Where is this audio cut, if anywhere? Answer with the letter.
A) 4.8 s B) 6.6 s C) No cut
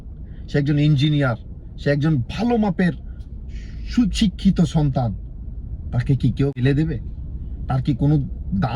B